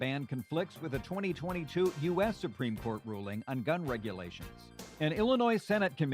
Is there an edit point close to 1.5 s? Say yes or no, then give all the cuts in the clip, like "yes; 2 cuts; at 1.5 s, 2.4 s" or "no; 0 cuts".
no; 1 cut; at 4.9 s